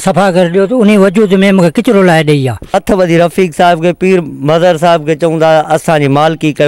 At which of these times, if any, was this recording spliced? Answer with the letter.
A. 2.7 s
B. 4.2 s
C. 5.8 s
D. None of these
A